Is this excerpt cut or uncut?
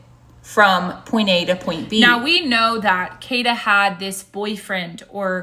cut